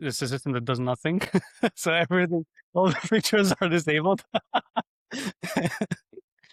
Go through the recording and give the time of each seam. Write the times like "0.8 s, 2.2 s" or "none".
none